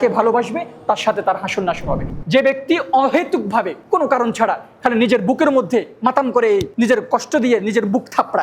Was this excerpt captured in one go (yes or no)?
no